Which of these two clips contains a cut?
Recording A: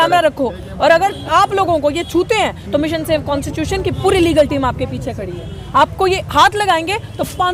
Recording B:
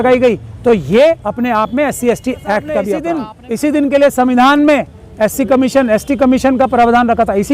B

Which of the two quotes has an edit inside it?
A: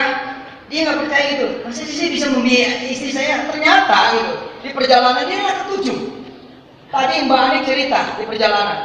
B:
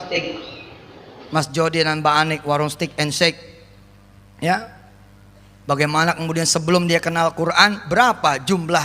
B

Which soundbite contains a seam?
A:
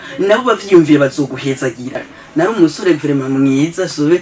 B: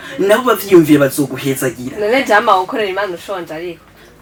A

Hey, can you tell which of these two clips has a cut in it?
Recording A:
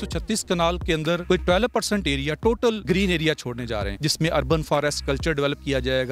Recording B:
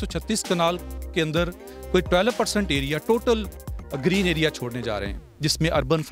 A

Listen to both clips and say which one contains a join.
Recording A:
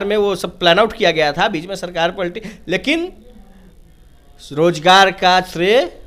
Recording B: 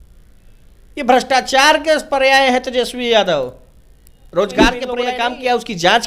B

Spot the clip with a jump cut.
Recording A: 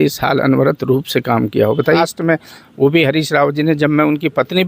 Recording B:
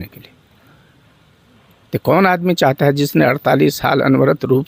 A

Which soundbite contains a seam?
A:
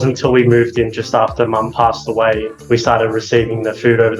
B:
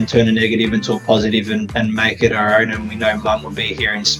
A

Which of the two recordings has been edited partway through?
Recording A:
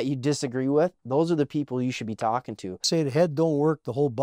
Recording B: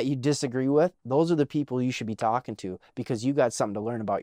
A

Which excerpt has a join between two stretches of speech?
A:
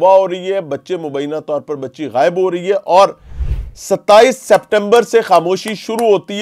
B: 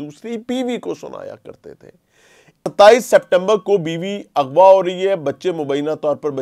B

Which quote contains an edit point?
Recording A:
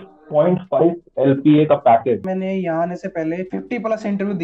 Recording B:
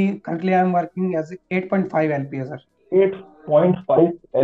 A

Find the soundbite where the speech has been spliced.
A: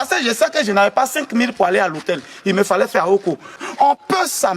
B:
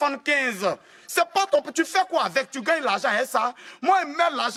A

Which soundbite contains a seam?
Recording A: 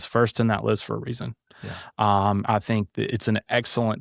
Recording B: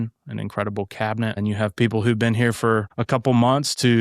B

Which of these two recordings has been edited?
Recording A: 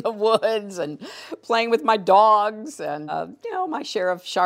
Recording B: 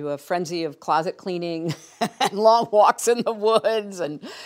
A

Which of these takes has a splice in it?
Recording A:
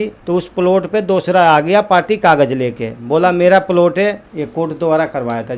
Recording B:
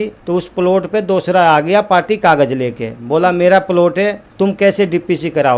A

